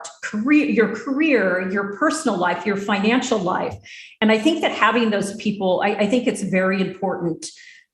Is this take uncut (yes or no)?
yes